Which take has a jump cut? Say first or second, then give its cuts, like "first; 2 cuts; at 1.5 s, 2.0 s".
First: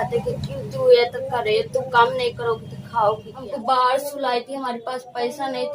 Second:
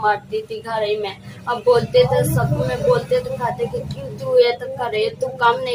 first; 1 cut; at 3.4 s